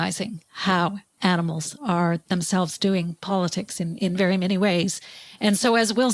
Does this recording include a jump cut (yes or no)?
no